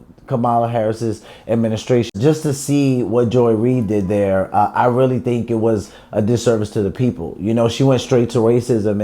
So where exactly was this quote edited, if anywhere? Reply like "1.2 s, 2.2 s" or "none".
2.1 s